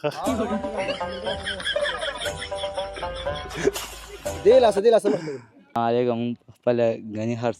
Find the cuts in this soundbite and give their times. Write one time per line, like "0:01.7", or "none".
0:05.8

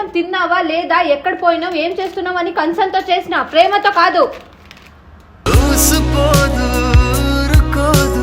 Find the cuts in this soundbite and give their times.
none

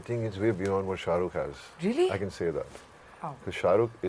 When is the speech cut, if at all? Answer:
none

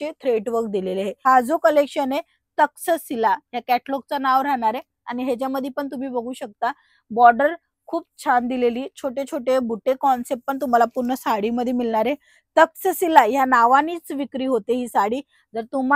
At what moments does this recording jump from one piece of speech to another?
0:01.2

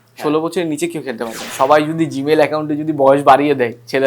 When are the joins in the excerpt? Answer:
0:01.4

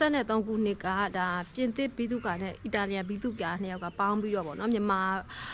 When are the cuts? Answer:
none

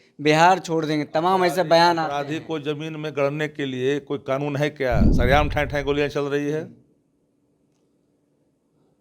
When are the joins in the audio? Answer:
0:05.1

